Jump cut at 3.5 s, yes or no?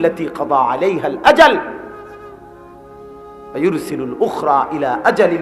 yes